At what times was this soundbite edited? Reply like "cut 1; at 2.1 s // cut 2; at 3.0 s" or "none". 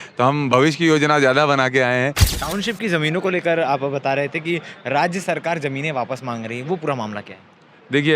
cut 1; at 2.3 s